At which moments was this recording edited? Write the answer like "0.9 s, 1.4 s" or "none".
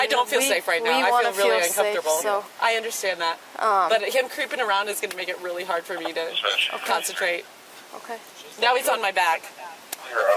none